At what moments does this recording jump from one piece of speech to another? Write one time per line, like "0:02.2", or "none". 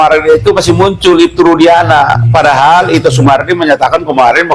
none